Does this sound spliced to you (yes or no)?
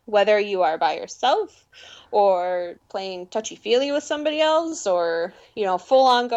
yes